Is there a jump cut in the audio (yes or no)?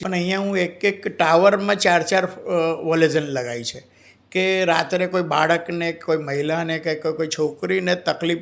no